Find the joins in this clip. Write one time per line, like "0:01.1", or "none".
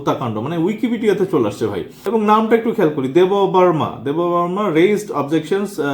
0:01.9